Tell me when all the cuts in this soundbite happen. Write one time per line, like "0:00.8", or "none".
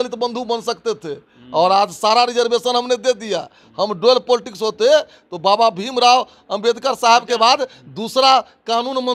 none